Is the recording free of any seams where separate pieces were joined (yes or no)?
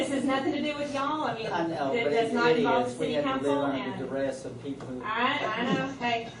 yes